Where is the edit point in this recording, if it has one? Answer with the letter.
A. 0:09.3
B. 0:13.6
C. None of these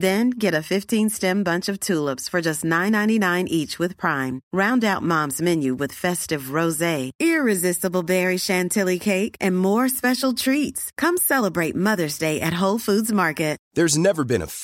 B